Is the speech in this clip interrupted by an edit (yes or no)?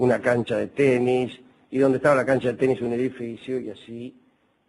no